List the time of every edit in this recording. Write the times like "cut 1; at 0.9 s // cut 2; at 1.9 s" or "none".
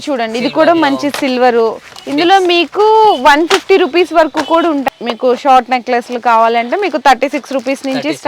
cut 1; at 4.8 s